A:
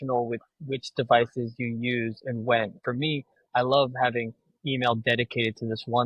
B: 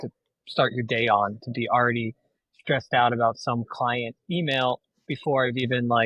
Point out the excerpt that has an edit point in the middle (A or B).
A